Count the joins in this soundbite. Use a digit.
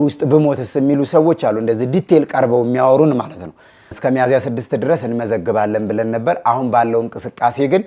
1